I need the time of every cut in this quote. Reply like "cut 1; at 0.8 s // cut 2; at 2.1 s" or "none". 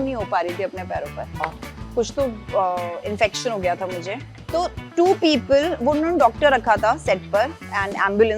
cut 1; at 1.4 s // cut 2; at 4.3 s